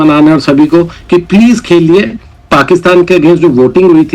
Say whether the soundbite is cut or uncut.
cut